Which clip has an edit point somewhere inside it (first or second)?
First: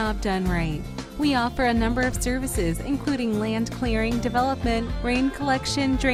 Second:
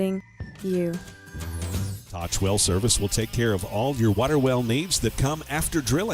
second